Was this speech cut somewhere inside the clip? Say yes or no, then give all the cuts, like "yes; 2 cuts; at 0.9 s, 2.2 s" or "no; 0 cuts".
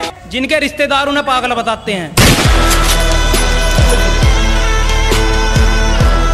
no; 0 cuts